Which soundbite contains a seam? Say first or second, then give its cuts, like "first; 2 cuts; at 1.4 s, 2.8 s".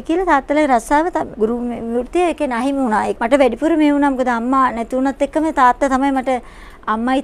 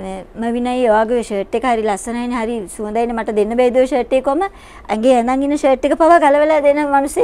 first; 2 cuts; at 1.3 s, 3.1 s